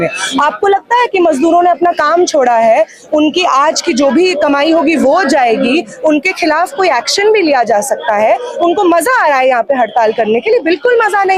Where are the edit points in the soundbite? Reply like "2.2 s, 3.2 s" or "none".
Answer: none